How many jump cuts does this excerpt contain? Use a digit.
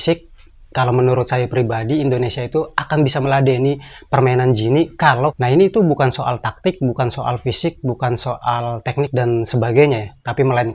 1